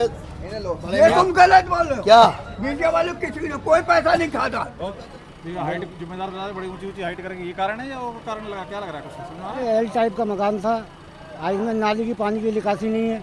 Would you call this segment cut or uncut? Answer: cut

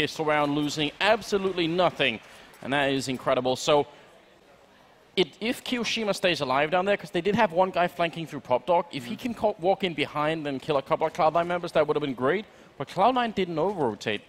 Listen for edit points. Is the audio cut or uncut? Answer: uncut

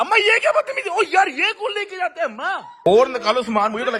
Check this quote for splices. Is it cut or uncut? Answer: cut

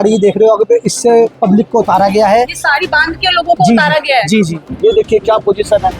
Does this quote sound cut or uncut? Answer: cut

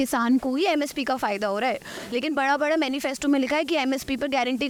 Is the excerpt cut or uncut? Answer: uncut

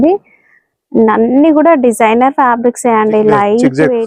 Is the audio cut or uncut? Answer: uncut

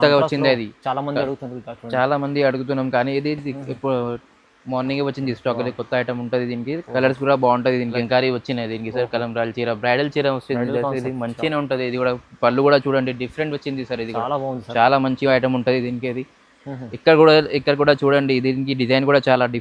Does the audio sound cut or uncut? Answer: cut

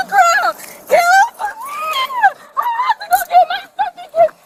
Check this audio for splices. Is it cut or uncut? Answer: uncut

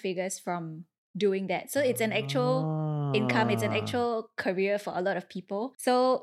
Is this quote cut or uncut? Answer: uncut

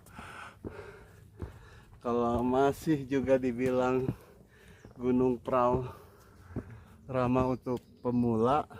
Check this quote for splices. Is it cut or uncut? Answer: uncut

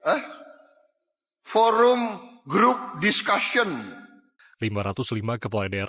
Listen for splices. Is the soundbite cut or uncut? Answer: cut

